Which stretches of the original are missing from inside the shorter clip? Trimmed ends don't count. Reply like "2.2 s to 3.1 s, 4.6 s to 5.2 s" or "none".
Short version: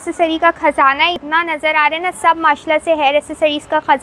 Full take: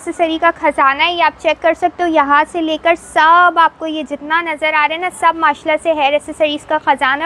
1.1 s to 4.1 s